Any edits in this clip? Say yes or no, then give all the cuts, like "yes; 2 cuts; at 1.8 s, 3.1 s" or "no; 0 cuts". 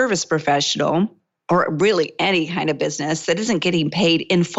yes; 1 cut; at 1.3 s